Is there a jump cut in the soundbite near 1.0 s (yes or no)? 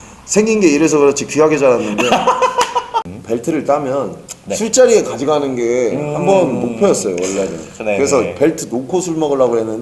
no